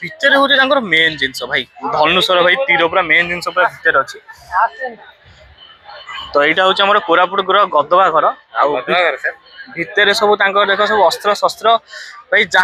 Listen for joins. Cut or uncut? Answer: uncut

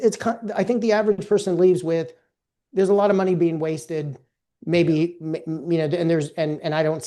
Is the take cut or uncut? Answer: uncut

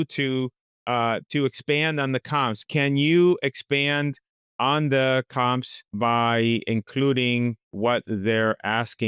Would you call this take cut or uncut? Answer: cut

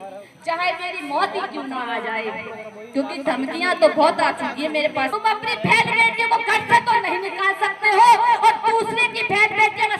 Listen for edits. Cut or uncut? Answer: cut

